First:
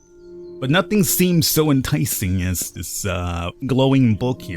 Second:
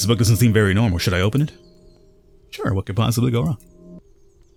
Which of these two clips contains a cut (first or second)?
first